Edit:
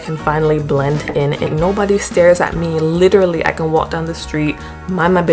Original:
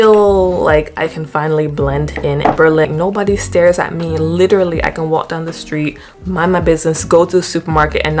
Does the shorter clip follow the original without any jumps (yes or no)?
no